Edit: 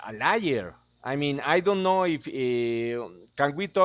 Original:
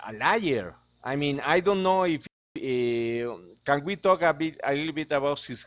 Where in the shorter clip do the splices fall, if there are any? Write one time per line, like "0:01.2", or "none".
0:02.3